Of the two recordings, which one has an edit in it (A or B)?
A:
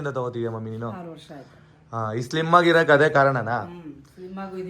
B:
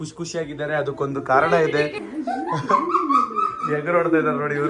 B